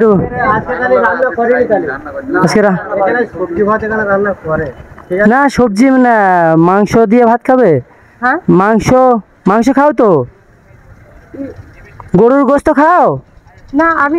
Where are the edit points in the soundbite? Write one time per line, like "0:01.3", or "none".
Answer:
none